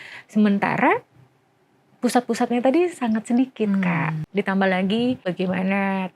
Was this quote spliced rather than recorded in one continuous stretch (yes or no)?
yes